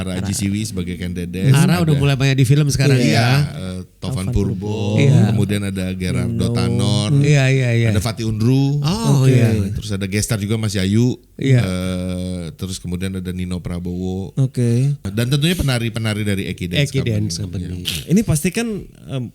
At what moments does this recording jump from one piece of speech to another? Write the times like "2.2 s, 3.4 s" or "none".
3.6 s, 15.1 s, 17.8 s